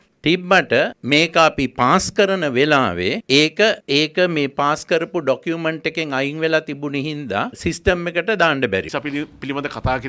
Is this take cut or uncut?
cut